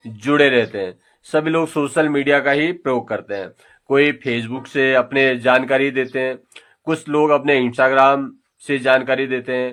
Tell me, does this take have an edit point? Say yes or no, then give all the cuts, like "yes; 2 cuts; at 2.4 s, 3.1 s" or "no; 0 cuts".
no; 0 cuts